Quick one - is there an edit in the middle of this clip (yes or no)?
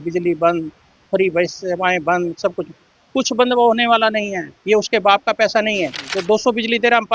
yes